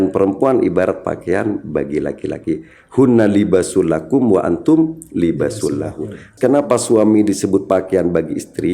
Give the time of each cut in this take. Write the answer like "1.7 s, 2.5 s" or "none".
6.2 s

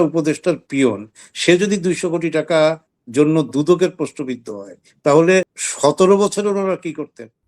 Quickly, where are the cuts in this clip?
5.6 s

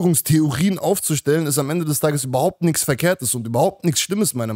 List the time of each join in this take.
none

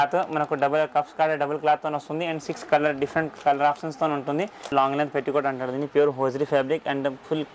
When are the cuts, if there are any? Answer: 4.7 s

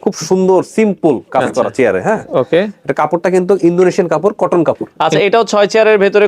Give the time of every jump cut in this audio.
4.9 s

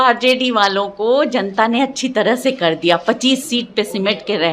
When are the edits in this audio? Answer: none

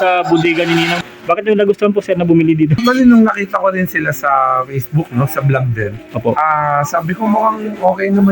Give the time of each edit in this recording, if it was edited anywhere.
1.0 s, 2.8 s

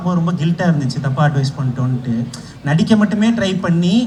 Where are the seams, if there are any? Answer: none

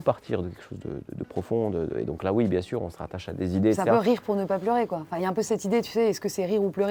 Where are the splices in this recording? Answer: none

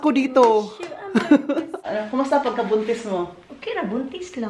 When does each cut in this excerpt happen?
1.8 s

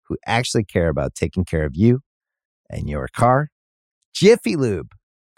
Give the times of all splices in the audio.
none

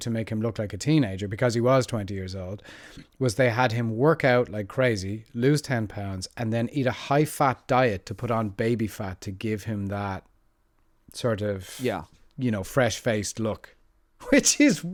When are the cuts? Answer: none

